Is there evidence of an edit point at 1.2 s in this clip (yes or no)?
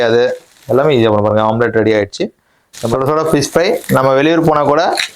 no